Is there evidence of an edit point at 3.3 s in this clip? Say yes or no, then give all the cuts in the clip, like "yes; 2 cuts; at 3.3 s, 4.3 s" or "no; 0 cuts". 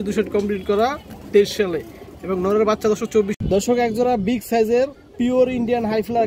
yes; 1 cut; at 3.3 s